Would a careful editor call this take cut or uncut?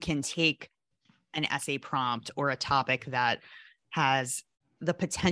uncut